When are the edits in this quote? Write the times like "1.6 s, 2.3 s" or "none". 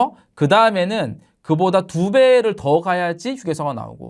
none